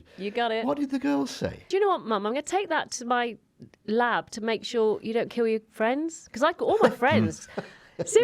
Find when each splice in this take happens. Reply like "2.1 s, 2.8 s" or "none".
1.7 s